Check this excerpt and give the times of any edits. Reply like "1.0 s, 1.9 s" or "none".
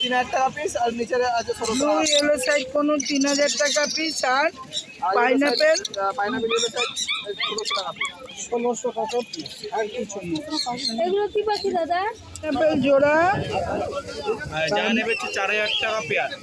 12.4 s